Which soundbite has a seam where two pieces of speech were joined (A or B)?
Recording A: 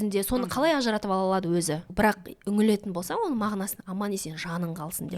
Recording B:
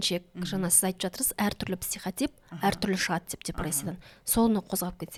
A